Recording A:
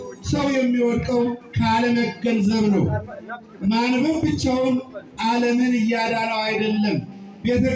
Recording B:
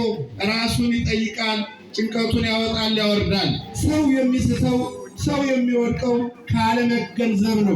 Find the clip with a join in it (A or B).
B